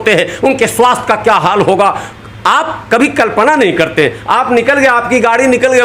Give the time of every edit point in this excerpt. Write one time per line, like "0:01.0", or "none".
none